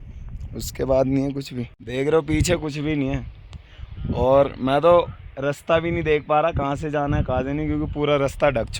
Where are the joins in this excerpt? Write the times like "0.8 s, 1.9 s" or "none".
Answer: 1.9 s

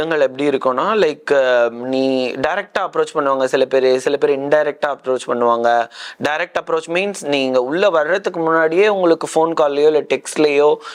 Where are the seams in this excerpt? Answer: none

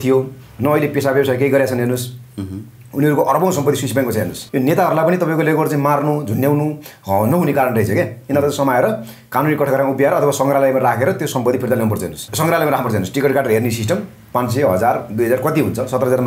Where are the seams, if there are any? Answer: 4.4 s, 12.2 s

